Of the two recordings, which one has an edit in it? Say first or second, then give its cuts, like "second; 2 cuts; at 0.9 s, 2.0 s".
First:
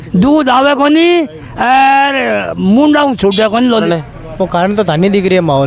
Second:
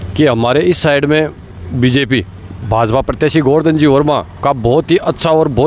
first; 1 cut; at 3.8 s